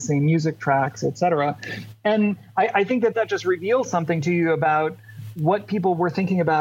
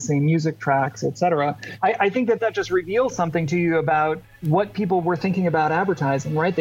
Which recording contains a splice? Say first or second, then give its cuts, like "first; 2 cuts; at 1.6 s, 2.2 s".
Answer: second; 2 cuts; at 1.7 s, 4.3 s